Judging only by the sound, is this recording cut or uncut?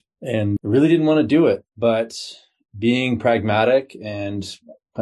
cut